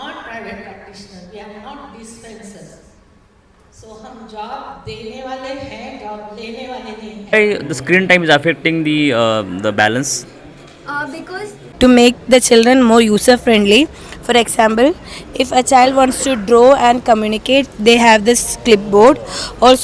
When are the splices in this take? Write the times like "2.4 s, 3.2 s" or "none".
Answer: 7.3 s, 11.6 s